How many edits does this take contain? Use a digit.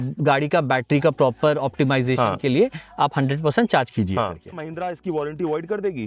1